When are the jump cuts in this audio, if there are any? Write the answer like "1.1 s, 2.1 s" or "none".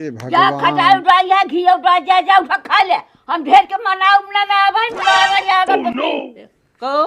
6.0 s